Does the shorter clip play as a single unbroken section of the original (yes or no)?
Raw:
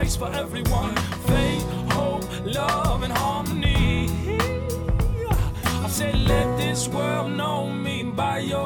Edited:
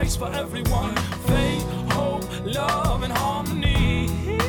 yes